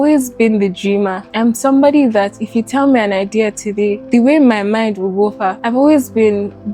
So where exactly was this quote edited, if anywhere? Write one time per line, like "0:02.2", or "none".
0:01.2
0:04.0
0:05.5